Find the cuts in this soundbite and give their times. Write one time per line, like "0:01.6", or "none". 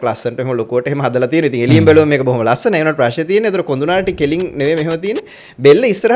none